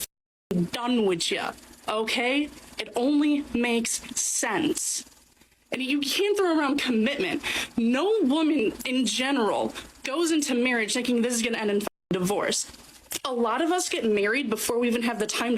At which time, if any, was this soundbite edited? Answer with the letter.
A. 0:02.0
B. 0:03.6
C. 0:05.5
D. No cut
A